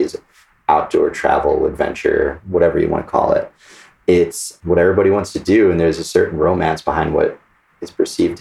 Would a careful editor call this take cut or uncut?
cut